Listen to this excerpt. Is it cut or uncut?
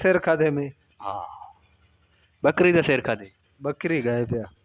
uncut